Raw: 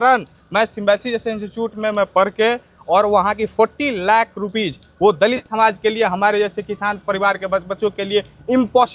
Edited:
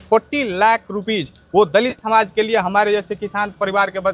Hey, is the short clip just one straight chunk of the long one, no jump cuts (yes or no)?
yes